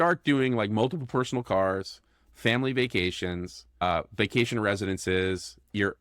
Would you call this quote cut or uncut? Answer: cut